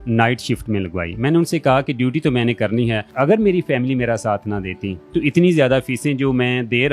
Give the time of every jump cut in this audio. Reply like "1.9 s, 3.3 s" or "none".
3.1 s